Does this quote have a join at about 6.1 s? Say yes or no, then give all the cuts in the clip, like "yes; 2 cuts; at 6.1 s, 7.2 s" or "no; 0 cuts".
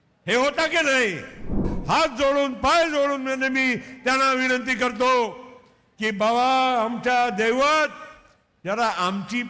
no; 1 cut; at 1.7 s